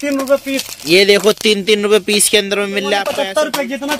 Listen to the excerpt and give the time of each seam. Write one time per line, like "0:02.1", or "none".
0:03.1